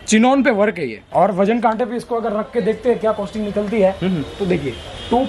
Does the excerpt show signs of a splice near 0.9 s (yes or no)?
yes